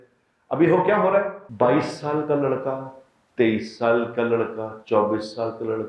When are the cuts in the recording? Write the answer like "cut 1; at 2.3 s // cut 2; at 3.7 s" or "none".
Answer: cut 1; at 1.4 s